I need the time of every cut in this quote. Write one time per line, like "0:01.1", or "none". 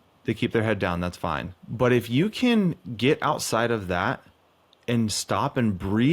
0:01.6